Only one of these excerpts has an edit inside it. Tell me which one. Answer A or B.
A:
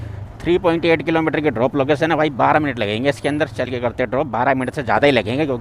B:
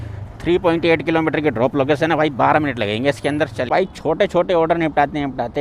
B